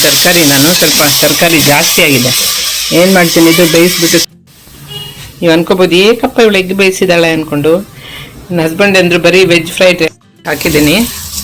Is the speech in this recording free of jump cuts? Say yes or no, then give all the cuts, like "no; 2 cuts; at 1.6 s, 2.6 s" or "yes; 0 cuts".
no; 2 cuts; at 4.2 s, 10.1 s